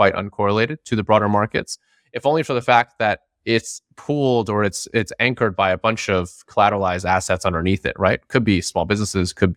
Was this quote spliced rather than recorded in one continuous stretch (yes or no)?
no